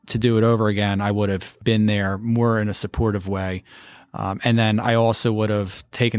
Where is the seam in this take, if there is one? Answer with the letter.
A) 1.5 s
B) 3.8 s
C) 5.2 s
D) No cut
A